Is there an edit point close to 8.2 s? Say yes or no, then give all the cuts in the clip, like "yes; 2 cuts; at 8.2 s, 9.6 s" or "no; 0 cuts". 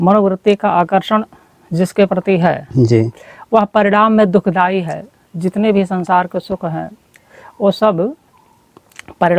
no; 0 cuts